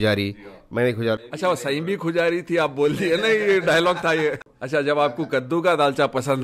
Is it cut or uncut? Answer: cut